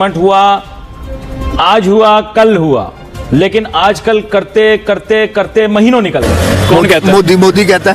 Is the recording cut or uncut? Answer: cut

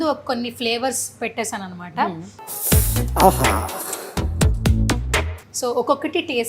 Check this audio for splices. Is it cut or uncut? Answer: uncut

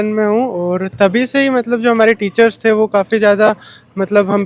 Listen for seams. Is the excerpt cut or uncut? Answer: uncut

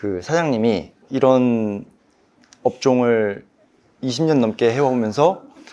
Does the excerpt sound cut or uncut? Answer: cut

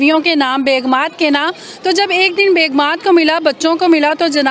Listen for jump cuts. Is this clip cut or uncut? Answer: uncut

